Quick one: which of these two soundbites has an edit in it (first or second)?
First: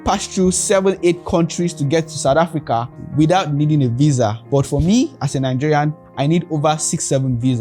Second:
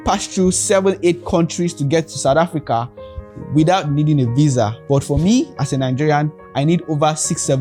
first